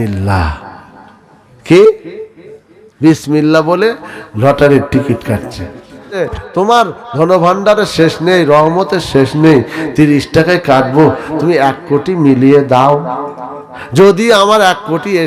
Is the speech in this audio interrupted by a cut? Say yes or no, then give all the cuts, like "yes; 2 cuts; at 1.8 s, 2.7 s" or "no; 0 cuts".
yes; 1 cut; at 6.2 s